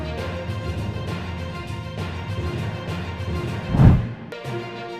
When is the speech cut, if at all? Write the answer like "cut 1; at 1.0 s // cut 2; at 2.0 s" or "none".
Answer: cut 1; at 3.8 s